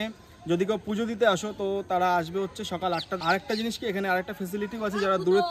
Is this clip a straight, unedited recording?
no; 1 cut; at 3.1 s

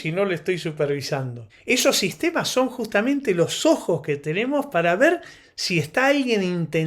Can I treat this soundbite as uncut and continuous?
no; 1 cut; at 1.4 s

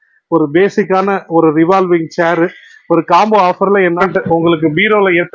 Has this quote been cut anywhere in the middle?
yes; 1 cut; at 4.0 s

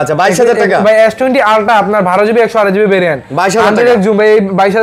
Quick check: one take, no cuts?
yes; 0 cuts

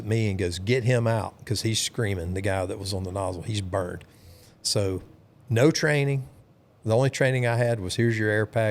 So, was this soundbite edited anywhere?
no; 0 cuts

